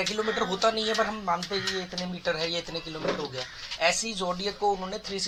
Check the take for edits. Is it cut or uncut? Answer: uncut